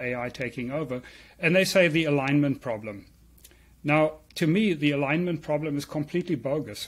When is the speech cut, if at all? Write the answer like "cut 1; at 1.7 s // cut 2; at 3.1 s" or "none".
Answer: none